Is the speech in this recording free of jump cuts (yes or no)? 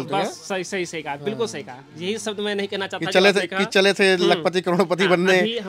yes